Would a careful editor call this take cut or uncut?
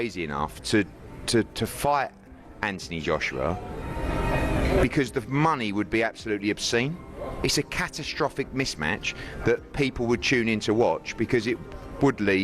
uncut